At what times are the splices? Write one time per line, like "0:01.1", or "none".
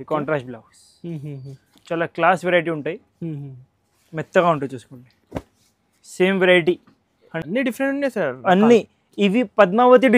0:07.3